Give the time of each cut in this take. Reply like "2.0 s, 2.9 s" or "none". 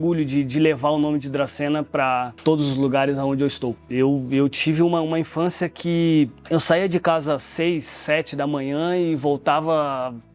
2.3 s, 3.8 s